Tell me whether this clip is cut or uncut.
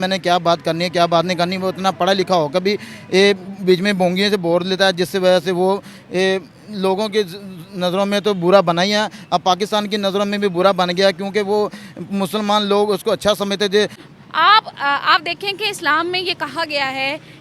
cut